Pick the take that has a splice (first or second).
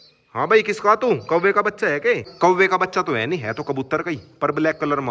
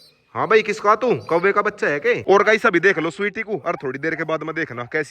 second